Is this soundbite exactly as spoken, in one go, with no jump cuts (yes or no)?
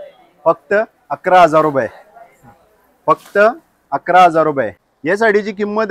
no